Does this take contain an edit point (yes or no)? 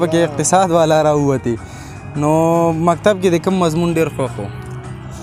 no